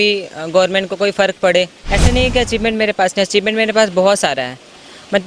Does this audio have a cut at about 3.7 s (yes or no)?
no